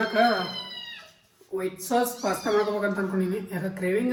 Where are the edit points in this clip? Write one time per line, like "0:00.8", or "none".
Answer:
none